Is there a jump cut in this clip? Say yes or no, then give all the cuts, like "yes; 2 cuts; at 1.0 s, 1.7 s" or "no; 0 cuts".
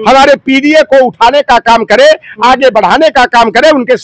no; 0 cuts